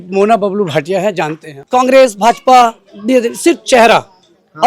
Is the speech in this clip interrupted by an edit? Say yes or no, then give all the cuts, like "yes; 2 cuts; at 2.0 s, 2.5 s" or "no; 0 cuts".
yes; 1 cut; at 1.5 s